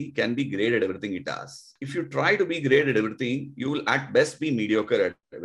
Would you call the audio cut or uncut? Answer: cut